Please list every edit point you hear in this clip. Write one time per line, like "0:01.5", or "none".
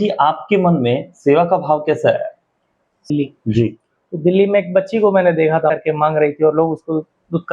0:03.1
0:05.7